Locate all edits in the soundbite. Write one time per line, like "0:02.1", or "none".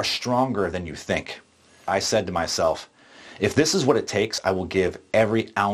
0:01.9
0:04.4